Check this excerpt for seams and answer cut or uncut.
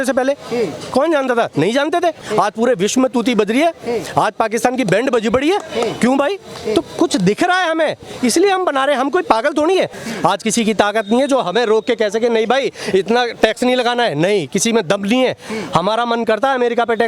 cut